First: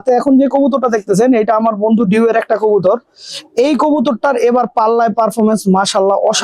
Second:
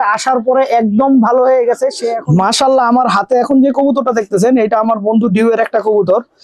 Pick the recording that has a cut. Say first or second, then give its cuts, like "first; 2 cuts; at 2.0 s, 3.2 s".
second; 1 cut; at 2.1 s